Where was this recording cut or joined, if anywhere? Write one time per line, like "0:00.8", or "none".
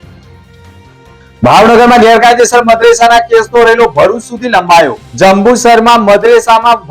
0:01.4